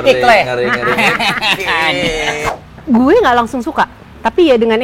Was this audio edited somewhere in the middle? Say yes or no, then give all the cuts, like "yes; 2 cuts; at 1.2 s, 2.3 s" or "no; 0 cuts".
yes; 1 cut; at 2.4 s